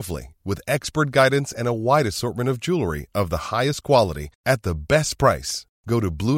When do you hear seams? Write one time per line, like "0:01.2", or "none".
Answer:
none